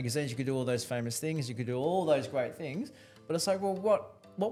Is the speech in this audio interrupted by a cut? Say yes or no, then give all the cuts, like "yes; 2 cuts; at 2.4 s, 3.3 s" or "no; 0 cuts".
no; 0 cuts